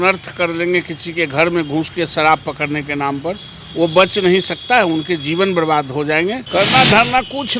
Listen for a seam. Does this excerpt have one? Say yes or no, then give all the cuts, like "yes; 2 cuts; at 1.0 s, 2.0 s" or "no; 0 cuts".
yes; 1 cut; at 6.4 s